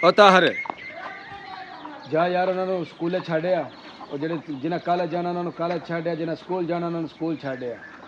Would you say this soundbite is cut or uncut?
uncut